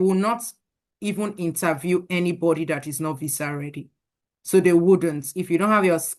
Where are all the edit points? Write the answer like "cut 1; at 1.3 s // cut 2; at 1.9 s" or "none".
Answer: none